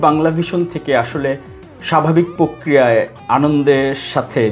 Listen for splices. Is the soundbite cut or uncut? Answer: uncut